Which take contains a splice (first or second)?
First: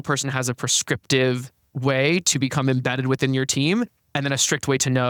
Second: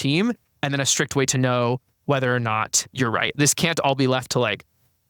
second